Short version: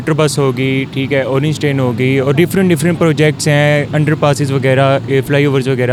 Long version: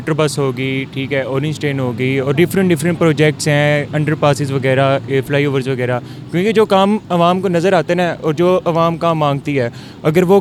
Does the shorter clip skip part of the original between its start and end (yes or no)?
no